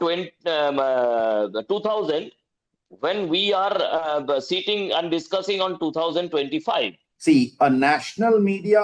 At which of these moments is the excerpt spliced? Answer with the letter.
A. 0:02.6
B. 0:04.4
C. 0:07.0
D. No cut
C